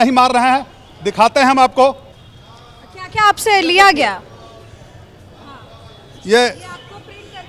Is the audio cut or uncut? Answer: uncut